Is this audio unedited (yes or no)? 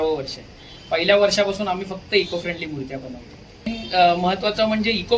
no